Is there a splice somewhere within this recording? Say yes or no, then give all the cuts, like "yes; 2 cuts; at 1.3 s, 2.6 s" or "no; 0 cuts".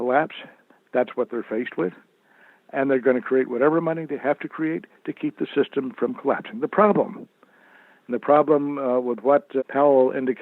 no; 0 cuts